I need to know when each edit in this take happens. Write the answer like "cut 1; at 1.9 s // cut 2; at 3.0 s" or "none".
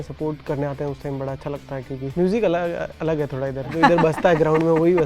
cut 1; at 2.1 s // cut 2; at 3.7 s